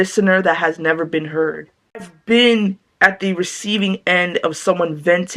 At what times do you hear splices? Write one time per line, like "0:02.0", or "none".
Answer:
0:02.1

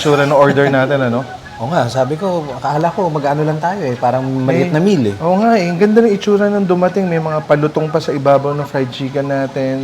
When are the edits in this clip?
none

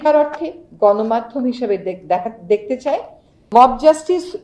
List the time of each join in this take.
0:03.5

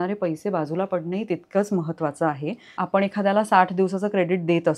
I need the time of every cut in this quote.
0:02.8

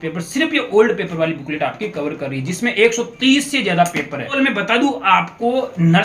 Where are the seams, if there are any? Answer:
0:04.3

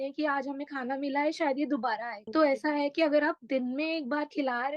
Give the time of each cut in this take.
0:02.2

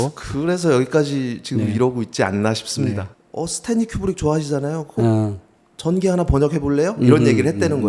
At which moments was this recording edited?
0:03.2

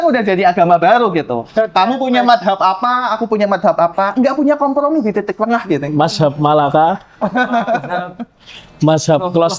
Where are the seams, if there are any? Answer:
none

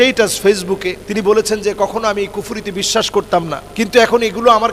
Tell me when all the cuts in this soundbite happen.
0:01.0
0:03.6

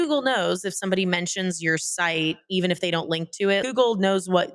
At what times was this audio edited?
0:03.6

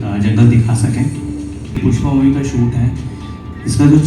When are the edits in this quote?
0:01.8

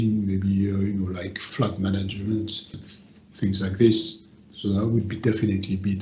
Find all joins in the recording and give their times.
0:01.5
0:02.7

